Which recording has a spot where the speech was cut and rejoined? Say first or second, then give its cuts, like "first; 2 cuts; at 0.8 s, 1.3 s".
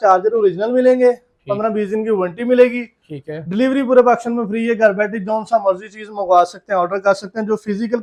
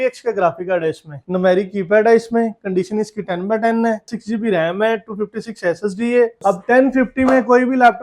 second; 3 cuts; at 1.2 s, 4.1 s, 6.4 s